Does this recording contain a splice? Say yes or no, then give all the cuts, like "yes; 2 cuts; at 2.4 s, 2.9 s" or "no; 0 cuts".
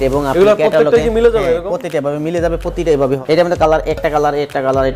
yes; 1 cut; at 3.2 s